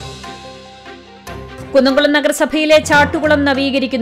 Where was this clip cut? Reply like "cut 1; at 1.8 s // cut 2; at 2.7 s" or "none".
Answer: none